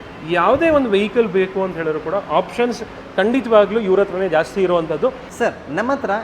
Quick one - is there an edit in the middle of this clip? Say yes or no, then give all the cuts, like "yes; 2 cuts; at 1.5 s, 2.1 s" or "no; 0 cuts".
yes; 1 cut; at 5.3 s